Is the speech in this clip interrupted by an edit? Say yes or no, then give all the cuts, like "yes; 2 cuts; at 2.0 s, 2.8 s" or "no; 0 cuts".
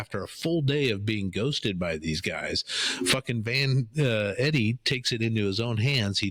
no; 0 cuts